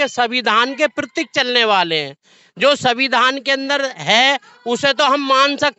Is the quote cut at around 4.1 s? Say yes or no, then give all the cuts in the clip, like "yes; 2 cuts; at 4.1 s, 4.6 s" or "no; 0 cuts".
no; 0 cuts